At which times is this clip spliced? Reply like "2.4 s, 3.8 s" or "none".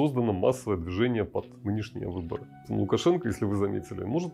2.7 s